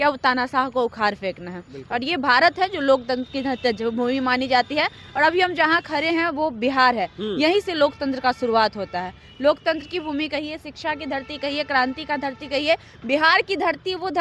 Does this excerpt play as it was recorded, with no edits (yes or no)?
yes